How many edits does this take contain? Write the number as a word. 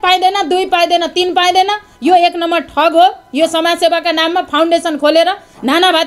zero